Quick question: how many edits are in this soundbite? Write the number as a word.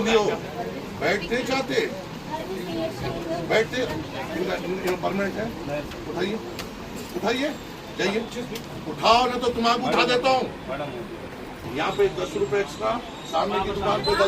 one